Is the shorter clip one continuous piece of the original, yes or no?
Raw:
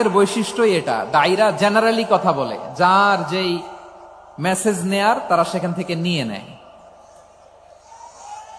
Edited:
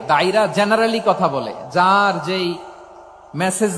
yes